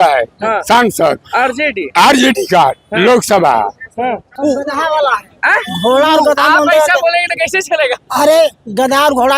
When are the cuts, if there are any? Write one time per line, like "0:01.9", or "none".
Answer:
0:04.3